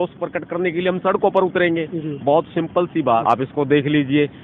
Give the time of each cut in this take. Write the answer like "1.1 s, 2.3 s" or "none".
3.2 s